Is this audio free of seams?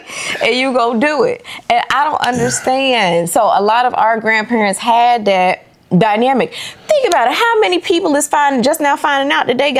yes; 0 cuts

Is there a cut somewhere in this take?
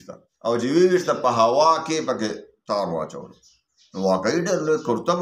no; 0 cuts

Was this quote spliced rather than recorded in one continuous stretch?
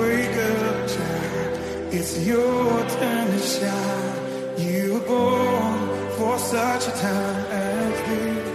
no; 0 cuts

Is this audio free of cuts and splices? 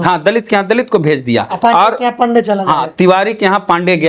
yes; 0 cuts

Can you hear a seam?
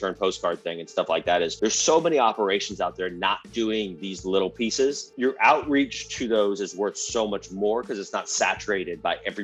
yes; 2 cuts; at 1.5 s, 5.1 s

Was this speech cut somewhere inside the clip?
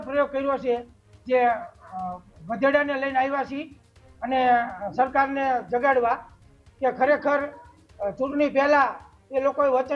no; 0 cuts

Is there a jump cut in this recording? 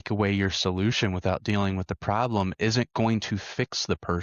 no; 0 cuts

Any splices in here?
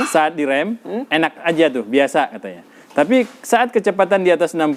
no; 0 cuts

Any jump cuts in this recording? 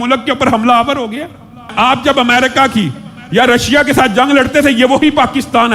yes; 1 cut; at 1.7 s

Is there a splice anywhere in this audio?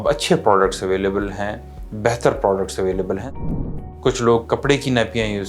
yes; 1 cut; at 3.4 s

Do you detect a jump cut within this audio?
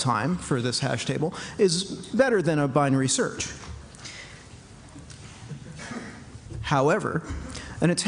no; 0 cuts

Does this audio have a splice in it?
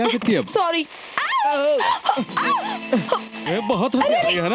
yes; 1 cut; at 3.4 s

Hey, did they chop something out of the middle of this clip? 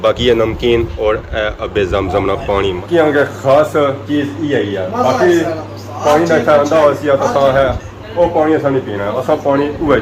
yes; 1 cut; at 2.8 s

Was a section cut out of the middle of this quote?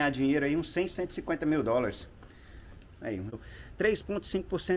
yes; 1 cut; at 3.3 s

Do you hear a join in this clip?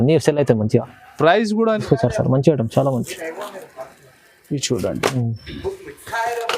yes; 1 cut; at 1.8 s

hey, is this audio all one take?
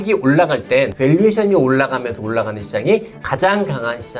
no; 1 cut; at 0.9 s

